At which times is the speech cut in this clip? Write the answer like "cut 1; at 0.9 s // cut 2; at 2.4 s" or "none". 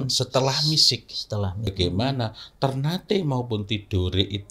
cut 1; at 1.7 s